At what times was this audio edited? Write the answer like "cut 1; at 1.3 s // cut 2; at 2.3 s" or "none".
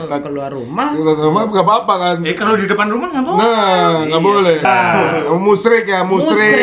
cut 1; at 4.6 s